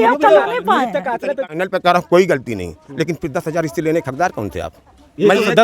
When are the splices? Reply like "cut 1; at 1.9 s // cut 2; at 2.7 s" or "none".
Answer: cut 1; at 1.4 s